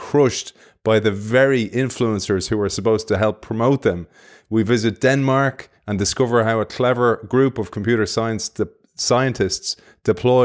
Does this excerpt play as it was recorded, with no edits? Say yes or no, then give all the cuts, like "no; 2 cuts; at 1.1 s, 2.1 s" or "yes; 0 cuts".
yes; 0 cuts